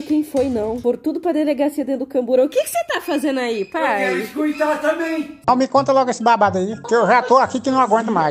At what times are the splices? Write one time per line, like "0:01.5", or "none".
0:05.3